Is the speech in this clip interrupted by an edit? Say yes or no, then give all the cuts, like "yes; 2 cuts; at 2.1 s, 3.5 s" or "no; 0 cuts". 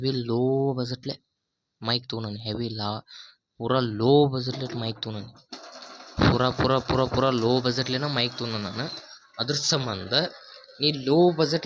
no; 0 cuts